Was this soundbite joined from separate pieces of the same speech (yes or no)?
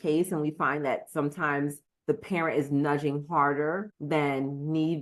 yes